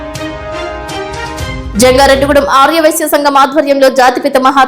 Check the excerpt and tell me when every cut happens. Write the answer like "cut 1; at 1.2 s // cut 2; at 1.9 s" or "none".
cut 1; at 1.6 s